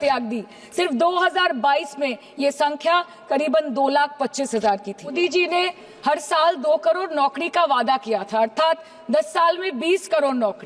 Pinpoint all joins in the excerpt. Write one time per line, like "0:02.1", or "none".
0:05.1